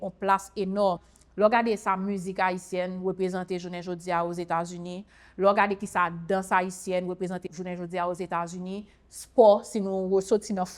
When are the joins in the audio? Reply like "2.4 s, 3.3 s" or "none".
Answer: 1.0 s